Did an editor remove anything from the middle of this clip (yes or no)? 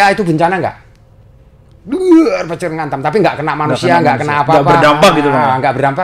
no